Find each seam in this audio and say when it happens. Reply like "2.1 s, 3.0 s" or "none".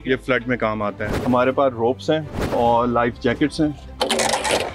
1.1 s, 2.4 s, 3.8 s